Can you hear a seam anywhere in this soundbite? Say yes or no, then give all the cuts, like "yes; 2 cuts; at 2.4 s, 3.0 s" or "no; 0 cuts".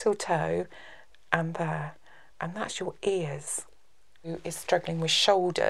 yes; 1 cut; at 4.3 s